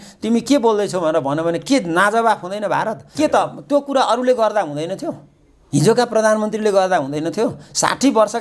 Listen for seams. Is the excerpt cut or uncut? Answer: cut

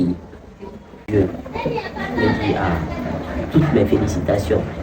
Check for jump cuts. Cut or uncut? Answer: cut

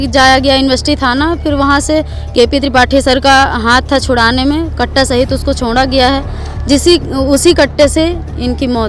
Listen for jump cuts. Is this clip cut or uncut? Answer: uncut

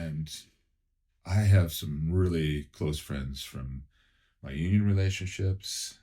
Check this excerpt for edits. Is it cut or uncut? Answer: uncut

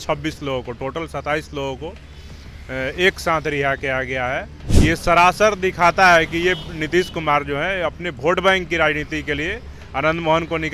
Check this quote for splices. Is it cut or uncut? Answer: cut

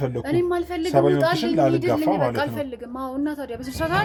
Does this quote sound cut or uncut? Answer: uncut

